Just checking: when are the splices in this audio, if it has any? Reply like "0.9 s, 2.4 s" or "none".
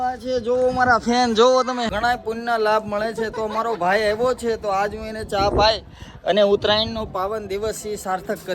1.9 s